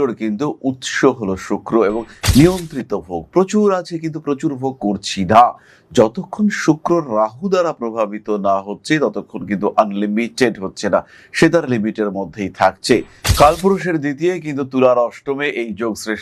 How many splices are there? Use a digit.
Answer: 1